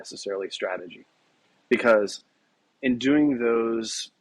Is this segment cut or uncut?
cut